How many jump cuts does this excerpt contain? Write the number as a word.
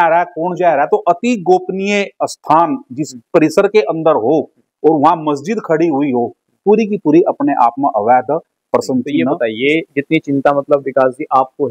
one